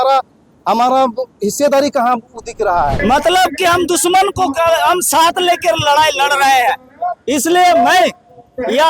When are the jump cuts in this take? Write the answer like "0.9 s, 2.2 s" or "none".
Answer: 3.0 s